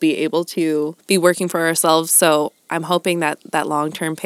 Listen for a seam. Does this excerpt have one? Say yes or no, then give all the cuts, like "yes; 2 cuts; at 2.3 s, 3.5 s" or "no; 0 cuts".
yes; 1 cut; at 1.0 s